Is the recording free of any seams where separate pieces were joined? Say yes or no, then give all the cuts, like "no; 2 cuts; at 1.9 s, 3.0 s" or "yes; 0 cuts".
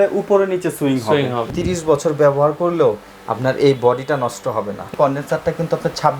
no; 2 cuts; at 1.5 s, 4.9 s